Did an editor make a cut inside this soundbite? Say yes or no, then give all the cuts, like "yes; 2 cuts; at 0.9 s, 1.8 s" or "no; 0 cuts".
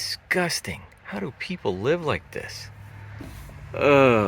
yes; 1 cut; at 3.3 s